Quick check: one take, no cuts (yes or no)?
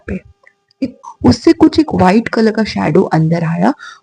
no